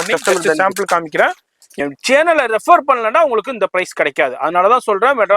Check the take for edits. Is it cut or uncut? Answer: cut